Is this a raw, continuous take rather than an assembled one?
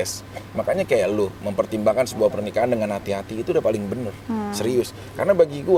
yes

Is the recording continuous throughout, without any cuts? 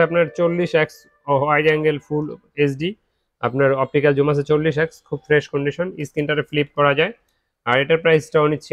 yes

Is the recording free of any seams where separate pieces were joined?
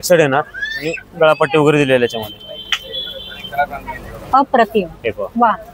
yes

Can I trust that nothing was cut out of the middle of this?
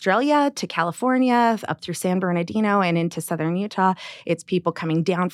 yes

